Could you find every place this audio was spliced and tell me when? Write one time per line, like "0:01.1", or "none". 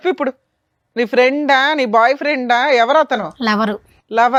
none